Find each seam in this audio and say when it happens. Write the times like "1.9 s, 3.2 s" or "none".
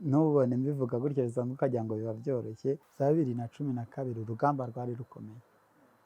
none